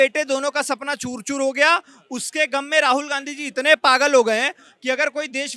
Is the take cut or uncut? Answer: uncut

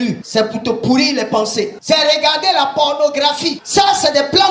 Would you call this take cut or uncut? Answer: cut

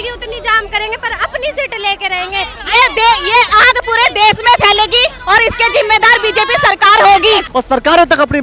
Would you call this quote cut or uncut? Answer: cut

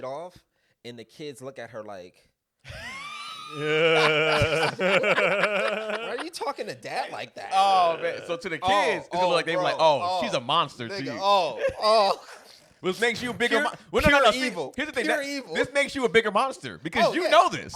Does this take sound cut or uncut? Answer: uncut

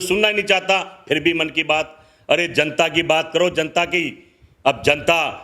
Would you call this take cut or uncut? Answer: uncut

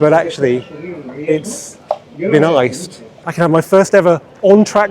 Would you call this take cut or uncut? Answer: cut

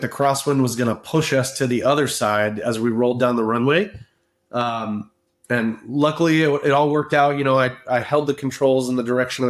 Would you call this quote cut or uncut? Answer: uncut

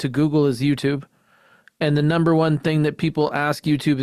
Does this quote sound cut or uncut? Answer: uncut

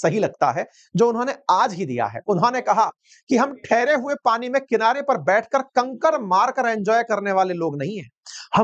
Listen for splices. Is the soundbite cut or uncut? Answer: uncut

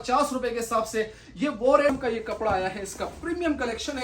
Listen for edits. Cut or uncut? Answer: cut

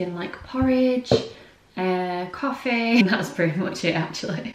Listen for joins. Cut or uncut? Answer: cut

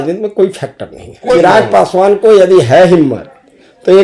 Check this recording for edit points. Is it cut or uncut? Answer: cut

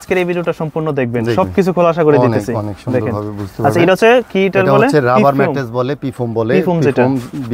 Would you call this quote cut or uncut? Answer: uncut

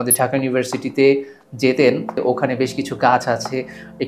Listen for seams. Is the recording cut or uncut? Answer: uncut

